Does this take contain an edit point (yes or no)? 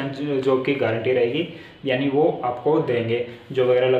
no